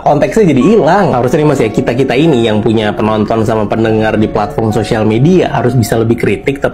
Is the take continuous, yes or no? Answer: yes